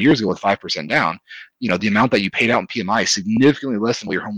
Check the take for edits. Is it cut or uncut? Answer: uncut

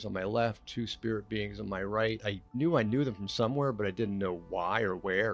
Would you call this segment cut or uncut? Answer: cut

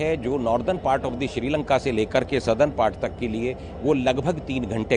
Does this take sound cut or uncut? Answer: uncut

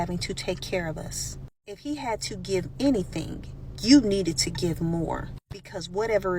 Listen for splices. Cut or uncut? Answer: cut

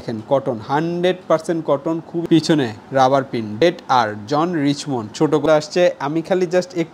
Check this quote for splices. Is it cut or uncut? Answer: cut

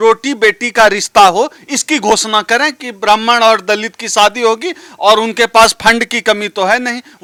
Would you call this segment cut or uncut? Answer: uncut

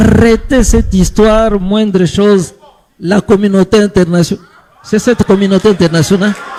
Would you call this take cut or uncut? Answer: uncut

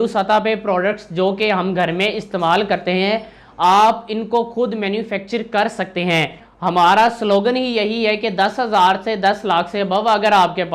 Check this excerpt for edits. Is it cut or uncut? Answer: cut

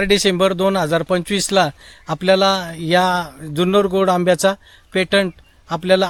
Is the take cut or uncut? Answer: uncut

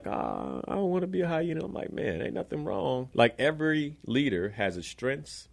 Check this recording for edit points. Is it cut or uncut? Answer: cut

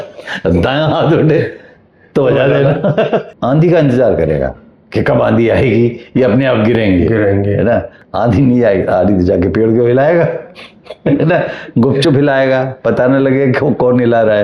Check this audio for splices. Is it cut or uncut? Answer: cut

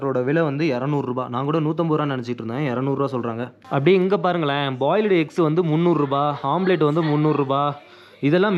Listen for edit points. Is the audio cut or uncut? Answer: uncut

